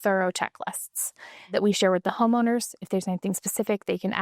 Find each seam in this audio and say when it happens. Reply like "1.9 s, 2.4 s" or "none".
1.5 s